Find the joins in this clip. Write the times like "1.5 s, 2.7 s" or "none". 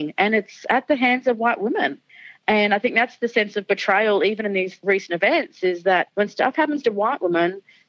6.1 s